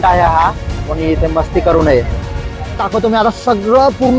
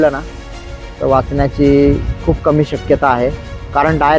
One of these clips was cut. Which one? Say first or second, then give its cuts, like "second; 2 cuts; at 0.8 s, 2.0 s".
first; 1 cut; at 2.8 s